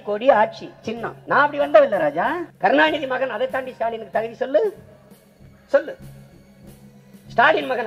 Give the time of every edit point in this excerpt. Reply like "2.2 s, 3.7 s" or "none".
1.1 s, 2.5 s